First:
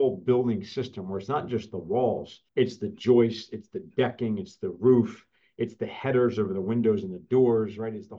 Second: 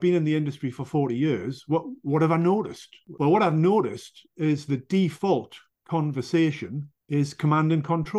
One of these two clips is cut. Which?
first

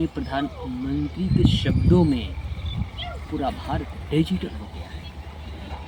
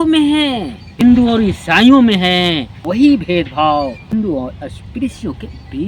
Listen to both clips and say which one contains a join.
second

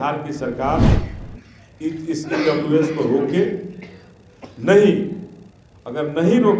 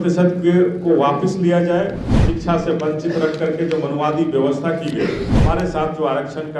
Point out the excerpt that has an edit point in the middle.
second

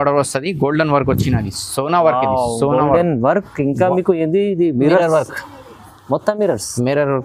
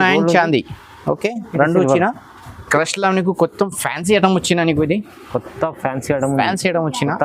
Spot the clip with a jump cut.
second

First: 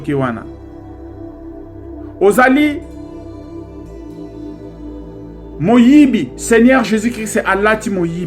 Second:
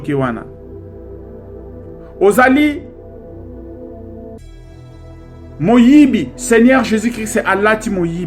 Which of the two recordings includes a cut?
first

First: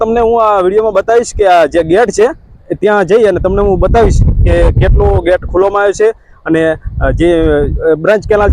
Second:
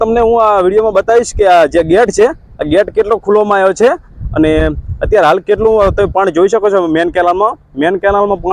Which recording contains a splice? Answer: first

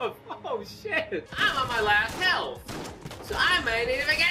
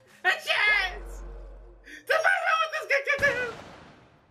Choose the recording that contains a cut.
first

